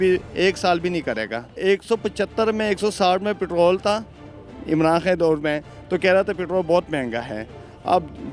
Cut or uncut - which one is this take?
cut